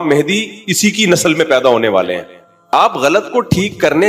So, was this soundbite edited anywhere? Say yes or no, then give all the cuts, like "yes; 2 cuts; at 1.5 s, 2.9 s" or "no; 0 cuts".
yes; 1 cut; at 2.7 s